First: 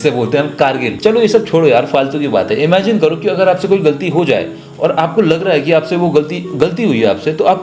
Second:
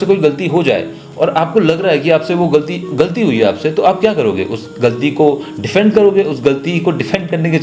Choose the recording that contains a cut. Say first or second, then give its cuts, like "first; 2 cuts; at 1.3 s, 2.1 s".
first; 1 cut; at 0.9 s